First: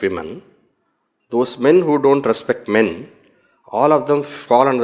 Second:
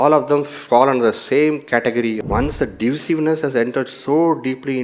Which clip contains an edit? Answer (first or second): second